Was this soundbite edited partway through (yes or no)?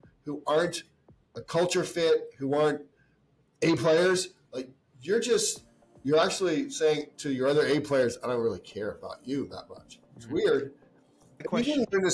yes